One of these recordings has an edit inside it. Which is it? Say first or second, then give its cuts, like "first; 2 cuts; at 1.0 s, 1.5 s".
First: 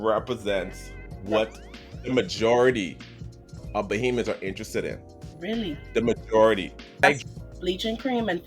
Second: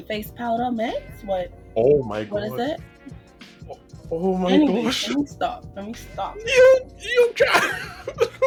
first; 1 cut; at 7.0 s